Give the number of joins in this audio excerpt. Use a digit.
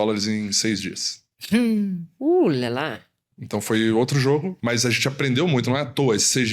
1